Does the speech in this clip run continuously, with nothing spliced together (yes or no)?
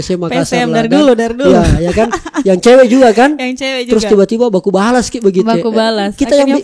yes